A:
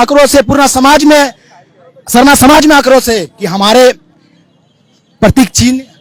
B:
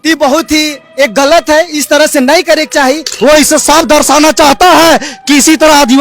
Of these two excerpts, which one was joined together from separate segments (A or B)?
B